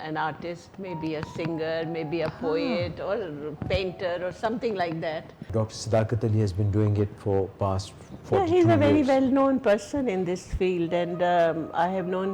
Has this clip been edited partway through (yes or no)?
yes